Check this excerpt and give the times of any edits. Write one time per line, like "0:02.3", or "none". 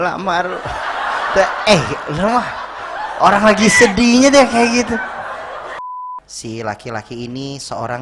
0:05.9